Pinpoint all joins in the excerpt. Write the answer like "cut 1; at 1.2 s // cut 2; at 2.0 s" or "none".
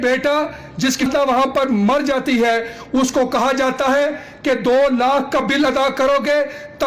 cut 1; at 1.0 s